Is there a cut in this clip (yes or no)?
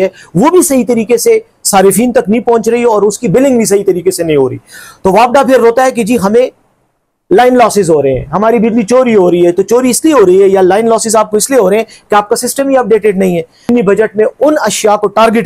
yes